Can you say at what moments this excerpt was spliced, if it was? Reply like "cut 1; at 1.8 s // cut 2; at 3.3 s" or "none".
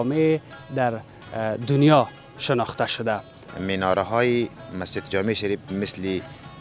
cut 1; at 3.4 s